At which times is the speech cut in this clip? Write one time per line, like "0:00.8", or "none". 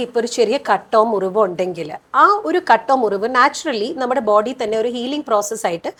none